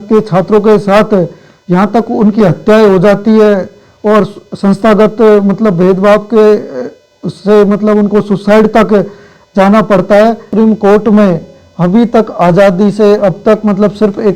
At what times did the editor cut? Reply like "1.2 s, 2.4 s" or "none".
10.4 s